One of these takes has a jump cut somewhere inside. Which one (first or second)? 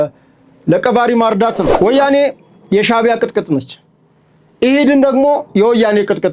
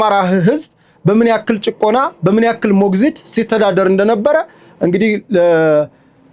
first